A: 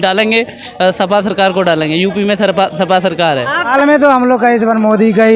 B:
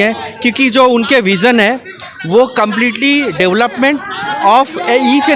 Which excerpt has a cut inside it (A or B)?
A